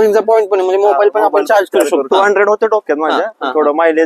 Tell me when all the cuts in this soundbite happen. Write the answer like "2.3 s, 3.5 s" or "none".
2.0 s